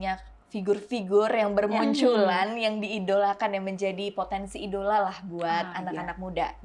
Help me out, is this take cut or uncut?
uncut